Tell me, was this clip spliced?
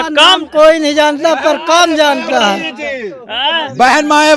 no; 0 cuts

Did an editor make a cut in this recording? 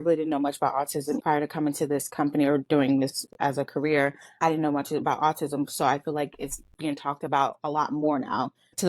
no; 0 cuts

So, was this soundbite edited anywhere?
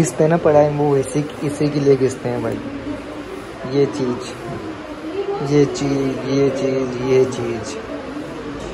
no; 0 cuts

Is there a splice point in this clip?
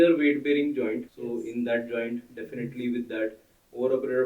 yes; 1 cut; at 1.1 s

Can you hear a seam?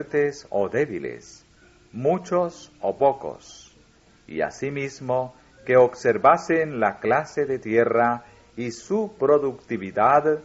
yes; 1 cut; at 2.5 s

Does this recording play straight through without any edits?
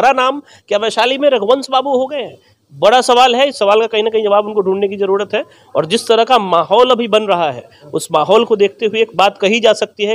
yes; 0 cuts

